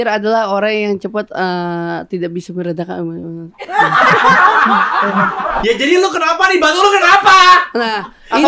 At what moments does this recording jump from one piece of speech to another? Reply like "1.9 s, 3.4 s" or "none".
5.6 s